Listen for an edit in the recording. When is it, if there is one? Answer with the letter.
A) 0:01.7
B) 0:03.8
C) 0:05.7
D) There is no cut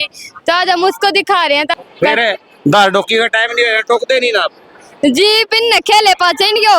A